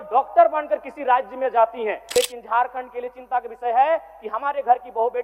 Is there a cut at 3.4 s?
no; 1 cut; at 2.0 s

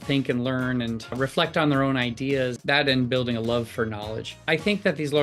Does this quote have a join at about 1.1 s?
yes; 2 cuts; at 1.1 s, 2.6 s

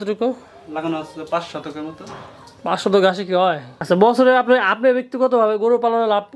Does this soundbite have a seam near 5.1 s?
no; 1 cut; at 3.7 s

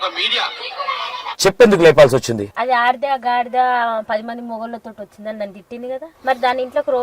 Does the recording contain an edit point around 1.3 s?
yes; 3 cuts; at 1.3 s, 2.5 s, 6.1 s

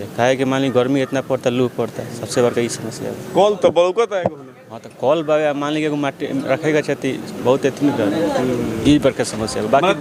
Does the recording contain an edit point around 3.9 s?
no; 0 cuts

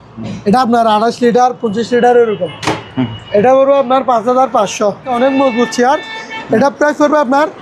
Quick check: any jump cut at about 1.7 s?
no; 1 cut; at 5.1 s

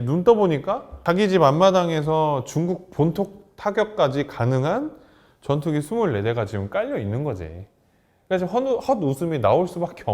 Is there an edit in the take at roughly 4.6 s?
no; 1 cut; at 1.0 s

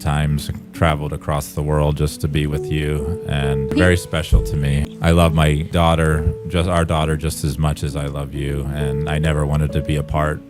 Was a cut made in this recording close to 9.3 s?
no; 3 cuts; at 3.7 s, 4.9 s, 5.7 s

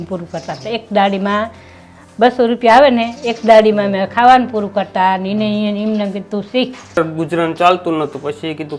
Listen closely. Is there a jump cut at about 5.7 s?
no; 1 cut; at 7.0 s

